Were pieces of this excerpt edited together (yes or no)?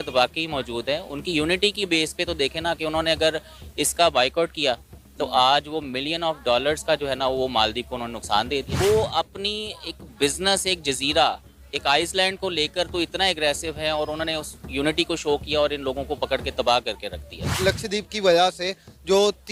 no